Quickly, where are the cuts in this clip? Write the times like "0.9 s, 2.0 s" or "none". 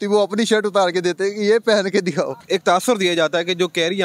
2.4 s